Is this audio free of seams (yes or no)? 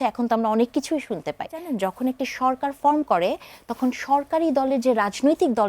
no